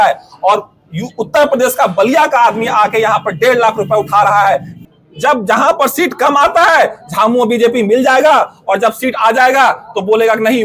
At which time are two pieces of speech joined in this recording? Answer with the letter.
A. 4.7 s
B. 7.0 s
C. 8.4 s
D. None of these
A